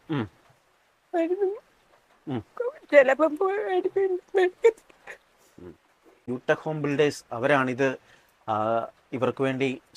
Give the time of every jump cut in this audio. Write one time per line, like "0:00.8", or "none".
0:06.3